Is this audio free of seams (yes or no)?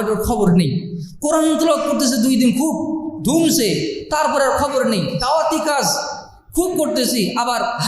yes